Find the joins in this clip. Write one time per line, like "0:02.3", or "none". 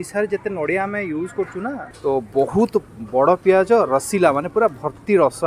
0:01.9